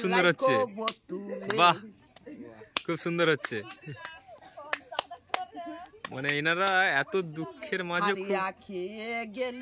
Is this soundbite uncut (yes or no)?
yes